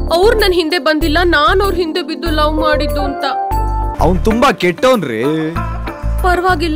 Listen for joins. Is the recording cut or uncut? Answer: cut